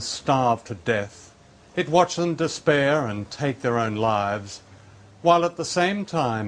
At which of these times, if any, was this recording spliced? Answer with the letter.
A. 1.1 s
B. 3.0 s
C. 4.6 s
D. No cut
D